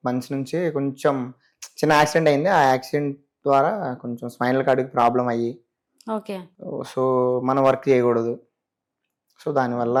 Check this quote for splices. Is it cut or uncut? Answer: uncut